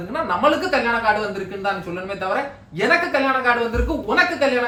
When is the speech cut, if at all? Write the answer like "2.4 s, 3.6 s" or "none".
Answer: none